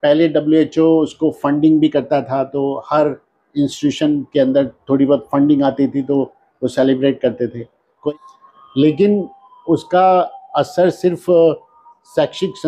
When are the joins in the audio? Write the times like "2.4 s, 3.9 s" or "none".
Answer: 8.0 s

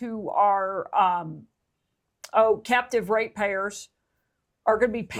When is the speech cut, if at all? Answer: none

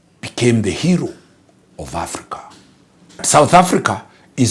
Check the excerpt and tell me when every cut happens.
3.3 s

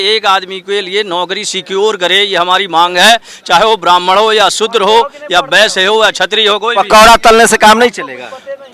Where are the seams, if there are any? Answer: none

